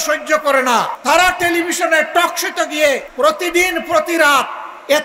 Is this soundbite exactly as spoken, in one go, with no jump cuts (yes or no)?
no